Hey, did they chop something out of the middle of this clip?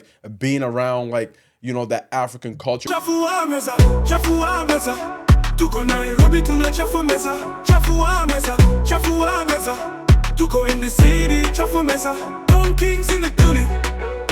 yes; 1 cut; at 2.8 s

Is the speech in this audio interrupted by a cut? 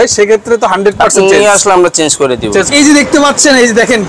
yes; 1 cut; at 2.7 s

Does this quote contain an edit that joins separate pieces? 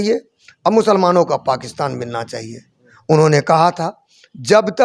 no; 0 cuts

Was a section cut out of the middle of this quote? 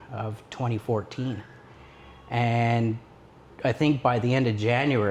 no; 0 cuts

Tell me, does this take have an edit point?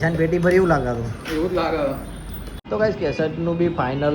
yes; 1 cut; at 2.1 s

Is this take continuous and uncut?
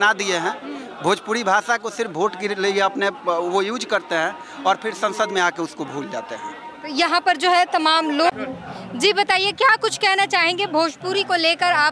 yes; 0 cuts

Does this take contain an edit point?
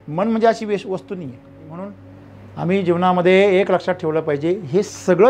yes; 1 cut; at 1.8 s

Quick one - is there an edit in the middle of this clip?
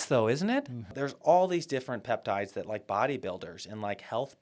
yes; 1 cut; at 1.0 s

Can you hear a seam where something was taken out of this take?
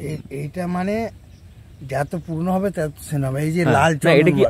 no; 0 cuts

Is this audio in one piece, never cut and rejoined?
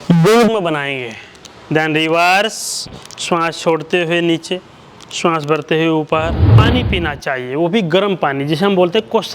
no; 1 cut; at 6.6 s

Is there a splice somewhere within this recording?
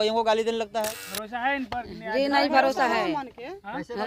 yes; 1 cut; at 1.0 s

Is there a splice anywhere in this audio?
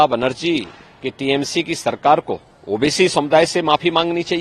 yes; 1 cut; at 2.5 s

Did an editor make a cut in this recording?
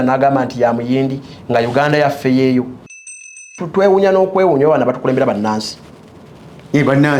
yes; 1 cut; at 3.2 s

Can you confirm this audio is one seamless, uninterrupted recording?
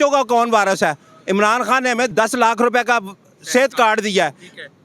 no; 1 cut; at 2.1 s

